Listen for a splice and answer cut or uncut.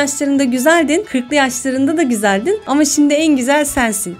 uncut